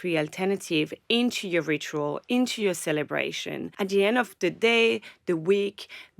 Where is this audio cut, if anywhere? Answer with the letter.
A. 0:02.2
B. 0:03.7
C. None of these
B